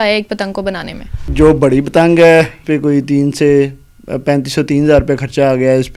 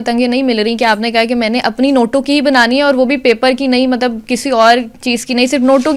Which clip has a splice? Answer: first; 2 cuts; at 1.3 s, 2.6 s

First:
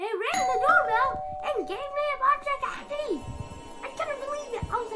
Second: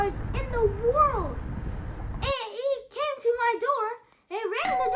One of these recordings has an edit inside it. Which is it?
first; 1 cut; at 3.8 s

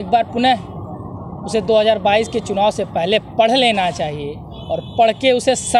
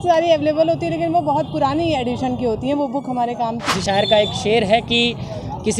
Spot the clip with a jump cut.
second; 1 cut; at 3.7 s

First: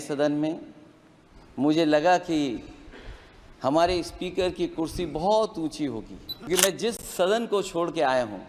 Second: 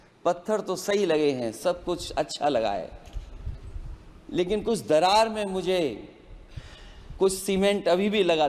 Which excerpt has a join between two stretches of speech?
first; 1 cut; at 6.5 s

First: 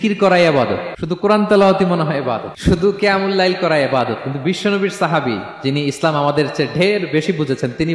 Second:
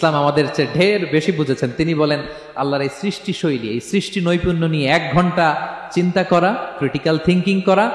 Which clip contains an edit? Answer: first; 2 cuts; at 0.9 s, 2.5 s

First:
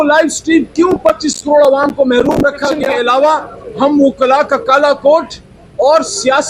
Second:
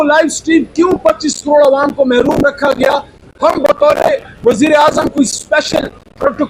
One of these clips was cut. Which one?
first; 1 cut; at 2.9 s

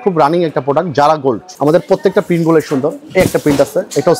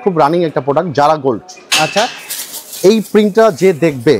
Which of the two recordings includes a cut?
first; 1 cut; at 1.5 s

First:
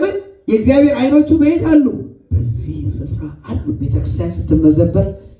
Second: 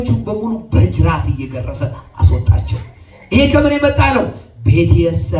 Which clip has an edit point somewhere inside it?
first; 1 cut; at 4.0 s

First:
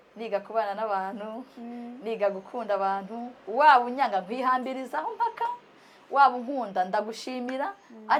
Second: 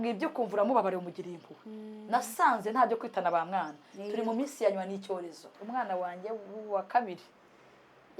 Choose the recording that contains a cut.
second; 1 cut; at 5.8 s

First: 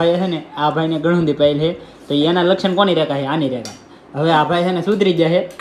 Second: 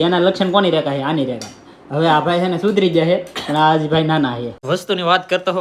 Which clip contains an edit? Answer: second; 1 cut; at 4.6 s

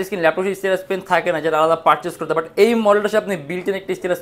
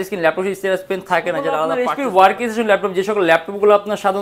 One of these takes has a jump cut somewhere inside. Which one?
second; 1 cut; at 1.7 s

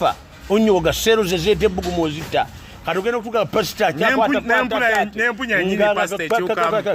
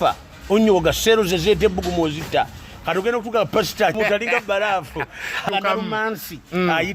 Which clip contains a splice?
second; 2 cuts; at 4.0 s, 5.5 s

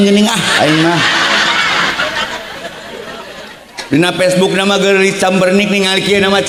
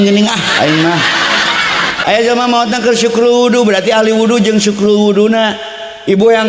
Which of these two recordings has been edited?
second; 1 cut; at 2.0 s

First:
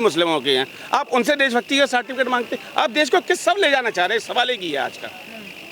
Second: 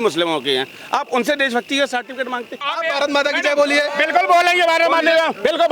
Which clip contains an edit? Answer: second; 1 cut; at 2.7 s

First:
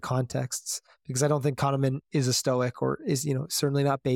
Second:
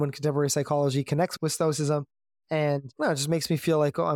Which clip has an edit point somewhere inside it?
second; 1 cut; at 1.3 s

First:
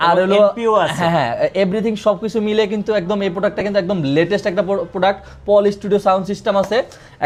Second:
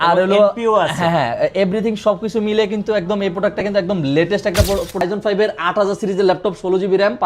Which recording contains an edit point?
second; 1 cut; at 5.0 s

